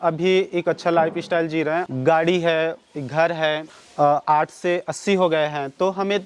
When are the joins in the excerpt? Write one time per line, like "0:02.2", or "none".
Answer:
0:01.9
0:03.7